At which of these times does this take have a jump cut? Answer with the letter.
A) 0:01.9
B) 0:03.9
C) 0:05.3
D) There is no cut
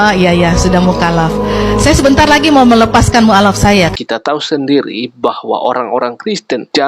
B